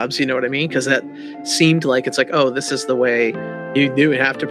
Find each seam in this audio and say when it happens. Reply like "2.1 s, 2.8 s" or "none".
3.6 s